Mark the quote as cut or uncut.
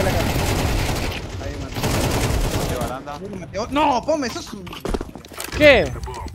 uncut